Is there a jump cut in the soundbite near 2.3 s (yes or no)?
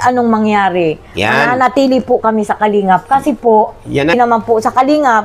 no